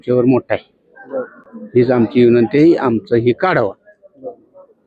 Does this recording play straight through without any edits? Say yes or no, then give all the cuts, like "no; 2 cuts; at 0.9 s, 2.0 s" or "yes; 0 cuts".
yes; 0 cuts